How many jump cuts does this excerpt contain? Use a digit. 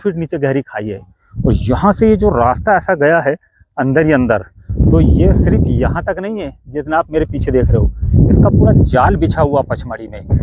0